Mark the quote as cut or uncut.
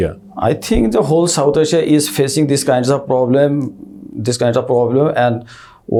uncut